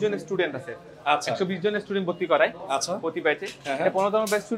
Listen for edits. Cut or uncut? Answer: uncut